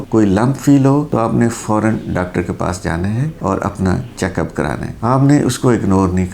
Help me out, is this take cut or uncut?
uncut